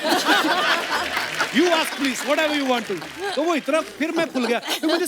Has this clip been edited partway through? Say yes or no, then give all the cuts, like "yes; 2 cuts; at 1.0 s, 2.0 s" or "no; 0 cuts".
no; 0 cuts